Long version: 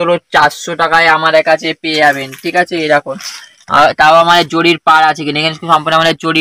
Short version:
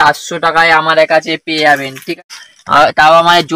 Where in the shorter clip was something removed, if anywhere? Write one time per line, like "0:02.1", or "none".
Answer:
0:02.1